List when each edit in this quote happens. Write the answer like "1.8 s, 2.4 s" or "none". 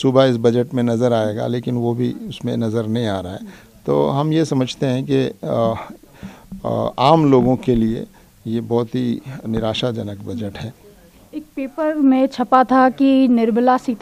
none